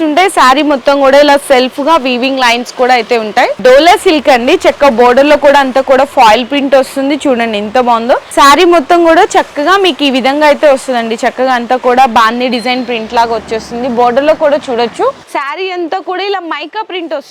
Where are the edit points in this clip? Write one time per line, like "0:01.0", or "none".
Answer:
0:03.6
0:08.3
0:15.3